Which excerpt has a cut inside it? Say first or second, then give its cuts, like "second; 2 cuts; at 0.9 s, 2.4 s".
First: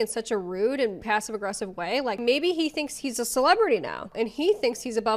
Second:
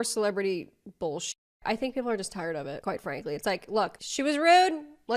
first; 1 cut; at 2.2 s